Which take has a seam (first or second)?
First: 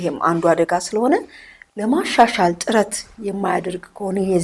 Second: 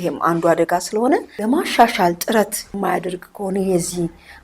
second